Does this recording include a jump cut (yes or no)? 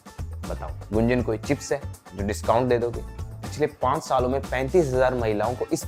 yes